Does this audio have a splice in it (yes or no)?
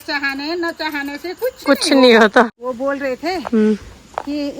yes